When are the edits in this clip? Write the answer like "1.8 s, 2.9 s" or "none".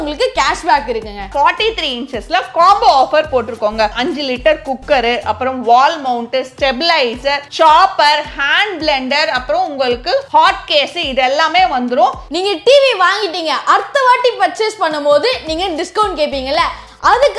1.3 s, 4.0 s, 12.3 s